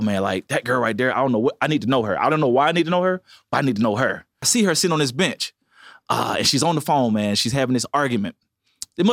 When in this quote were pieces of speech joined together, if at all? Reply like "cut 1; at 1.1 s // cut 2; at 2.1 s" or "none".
cut 1; at 4.5 s

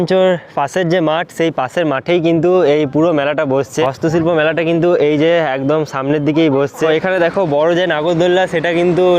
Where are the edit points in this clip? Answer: cut 1; at 3.8 s // cut 2; at 6.9 s

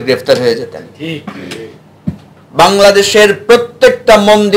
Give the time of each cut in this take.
cut 1; at 2.3 s

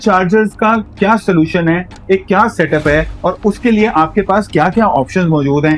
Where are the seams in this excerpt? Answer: none

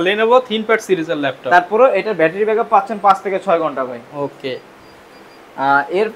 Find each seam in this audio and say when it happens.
none

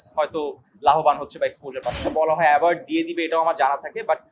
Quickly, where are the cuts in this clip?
cut 1; at 2.0 s

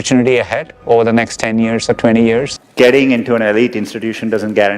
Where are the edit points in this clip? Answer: cut 1; at 2.6 s

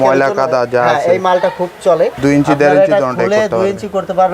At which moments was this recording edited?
cut 1; at 2.2 s

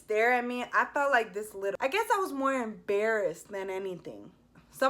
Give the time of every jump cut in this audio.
cut 1; at 1.7 s

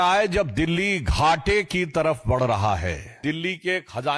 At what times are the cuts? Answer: cut 1; at 3.2 s

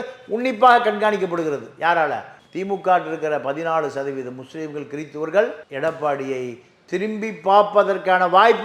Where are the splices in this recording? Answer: cut 1; at 2.3 s

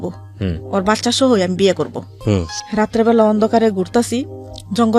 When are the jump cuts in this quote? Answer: cut 1; at 2.1 s

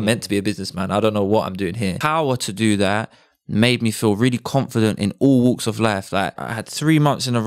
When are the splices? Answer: cut 1; at 2.0 s // cut 2; at 6.5 s

